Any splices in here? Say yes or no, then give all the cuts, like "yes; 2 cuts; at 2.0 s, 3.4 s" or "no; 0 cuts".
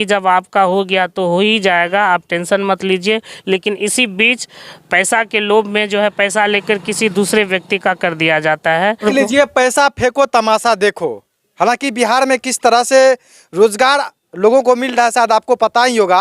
yes; 1 cut; at 9.0 s